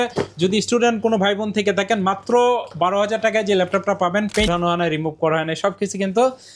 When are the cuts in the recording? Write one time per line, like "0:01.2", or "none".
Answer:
0:04.5